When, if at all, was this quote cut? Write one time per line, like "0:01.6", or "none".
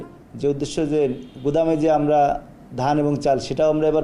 none

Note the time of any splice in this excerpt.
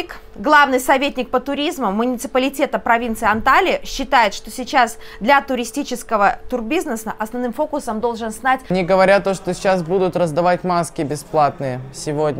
0:08.7

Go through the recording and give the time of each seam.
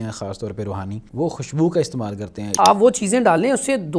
0:01.0
0:02.5

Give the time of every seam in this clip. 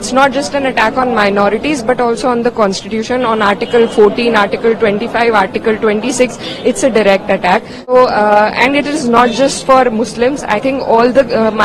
0:07.9

